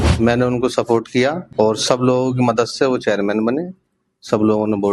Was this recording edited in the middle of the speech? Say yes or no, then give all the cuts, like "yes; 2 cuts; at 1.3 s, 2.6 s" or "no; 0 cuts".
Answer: yes; 1 cut; at 1.4 s